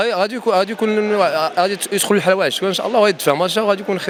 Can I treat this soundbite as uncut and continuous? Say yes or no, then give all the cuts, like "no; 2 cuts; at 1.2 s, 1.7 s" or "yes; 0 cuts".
yes; 0 cuts